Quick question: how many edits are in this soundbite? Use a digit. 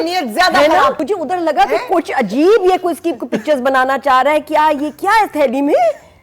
1